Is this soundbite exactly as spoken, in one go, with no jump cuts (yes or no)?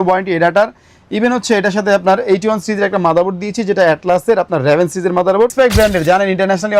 no